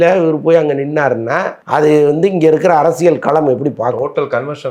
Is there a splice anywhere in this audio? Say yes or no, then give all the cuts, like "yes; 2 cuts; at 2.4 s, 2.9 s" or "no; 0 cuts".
yes; 1 cut; at 1.6 s